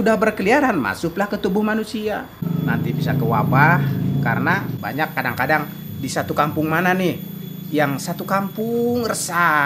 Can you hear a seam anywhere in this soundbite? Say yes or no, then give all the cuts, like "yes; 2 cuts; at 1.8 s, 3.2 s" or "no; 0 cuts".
yes; 2 cuts; at 2.4 s, 4.7 s